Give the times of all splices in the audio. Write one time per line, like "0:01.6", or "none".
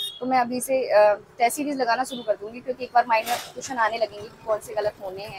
none

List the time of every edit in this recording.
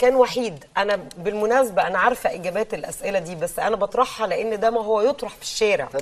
none

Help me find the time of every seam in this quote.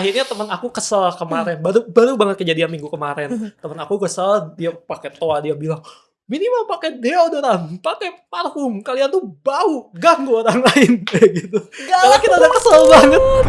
none

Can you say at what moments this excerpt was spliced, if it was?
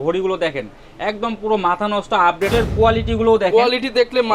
0:02.5

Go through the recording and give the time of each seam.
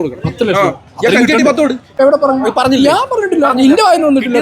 0:01.9

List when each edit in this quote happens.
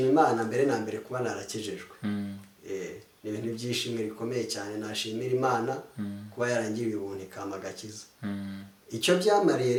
none

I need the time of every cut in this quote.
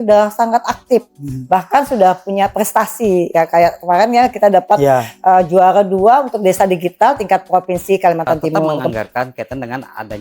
0:08.8

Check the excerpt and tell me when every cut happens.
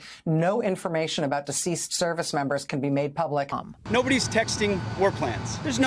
0:03.7

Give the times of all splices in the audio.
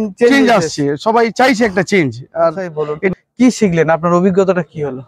0:02.9

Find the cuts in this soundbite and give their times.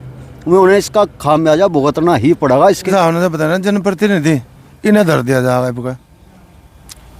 0:02.8

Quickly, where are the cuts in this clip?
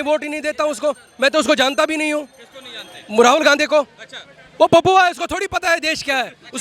none

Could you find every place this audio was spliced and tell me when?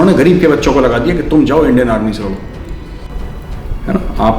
0:03.0

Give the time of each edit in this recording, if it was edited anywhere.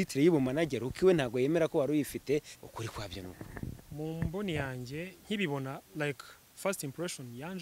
0:02.6
0:03.8

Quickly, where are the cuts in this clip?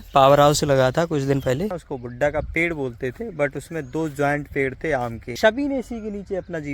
0:01.8
0:05.2

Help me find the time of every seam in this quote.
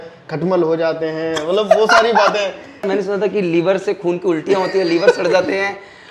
0:02.8

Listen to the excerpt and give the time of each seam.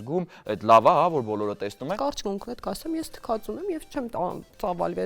0:02.0

